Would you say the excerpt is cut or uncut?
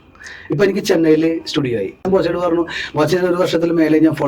cut